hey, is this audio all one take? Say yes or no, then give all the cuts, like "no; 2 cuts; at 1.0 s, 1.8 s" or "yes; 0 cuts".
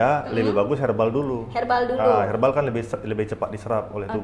yes; 0 cuts